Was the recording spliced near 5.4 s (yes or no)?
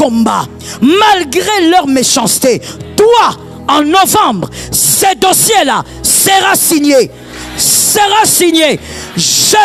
no